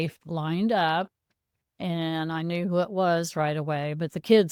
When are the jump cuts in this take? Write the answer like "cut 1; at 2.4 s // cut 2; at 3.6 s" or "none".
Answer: none